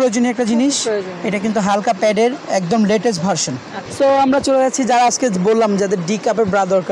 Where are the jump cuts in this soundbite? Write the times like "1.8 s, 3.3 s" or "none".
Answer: 3.8 s